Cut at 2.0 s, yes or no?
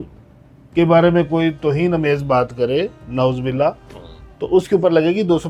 no